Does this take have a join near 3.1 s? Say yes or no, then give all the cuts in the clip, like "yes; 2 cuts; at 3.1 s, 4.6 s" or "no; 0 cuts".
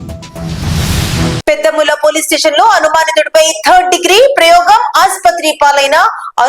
no; 1 cut; at 1.4 s